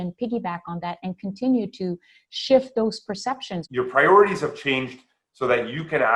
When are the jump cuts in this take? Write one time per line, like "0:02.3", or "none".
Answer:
0:03.6